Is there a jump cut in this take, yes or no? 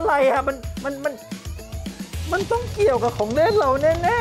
no